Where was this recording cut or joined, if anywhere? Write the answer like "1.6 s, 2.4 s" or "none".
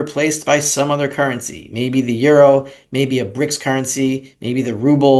none